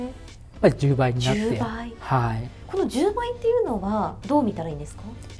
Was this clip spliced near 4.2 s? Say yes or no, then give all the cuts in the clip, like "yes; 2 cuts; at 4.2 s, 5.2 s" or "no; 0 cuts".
yes; 1 cut; at 4.2 s